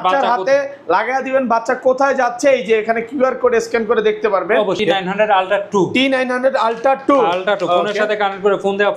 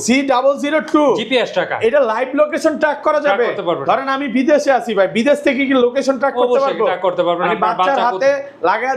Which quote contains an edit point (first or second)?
first